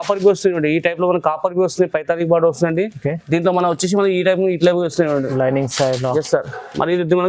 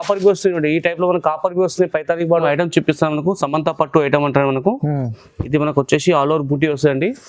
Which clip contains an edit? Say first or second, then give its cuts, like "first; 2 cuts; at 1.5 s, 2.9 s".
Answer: second; 1 cut; at 2.4 s